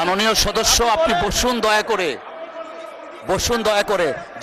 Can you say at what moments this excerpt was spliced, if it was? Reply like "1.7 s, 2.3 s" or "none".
none